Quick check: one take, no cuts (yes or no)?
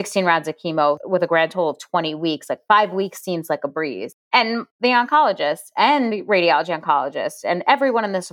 yes